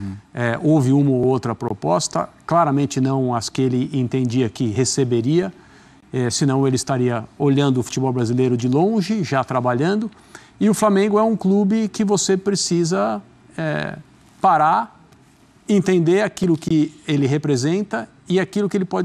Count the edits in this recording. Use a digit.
0